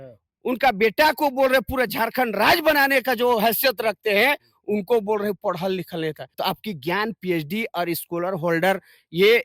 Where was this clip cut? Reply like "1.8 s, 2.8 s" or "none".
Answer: 6.3 s